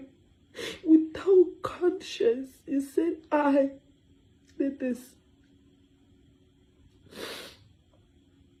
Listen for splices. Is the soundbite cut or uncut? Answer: uncut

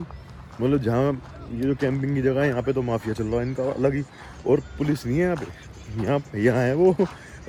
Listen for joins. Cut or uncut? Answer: uncut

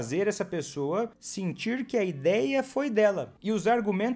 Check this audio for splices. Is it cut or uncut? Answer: cut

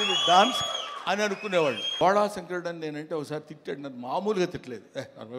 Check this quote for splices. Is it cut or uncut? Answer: cut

